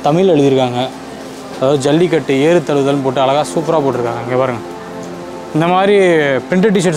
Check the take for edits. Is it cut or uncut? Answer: uncut